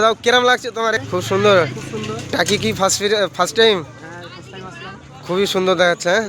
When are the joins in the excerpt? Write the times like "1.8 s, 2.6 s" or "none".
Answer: 1.0 s